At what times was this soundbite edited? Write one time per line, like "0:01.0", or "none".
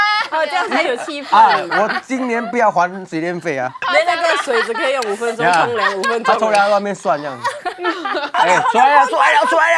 0:03.8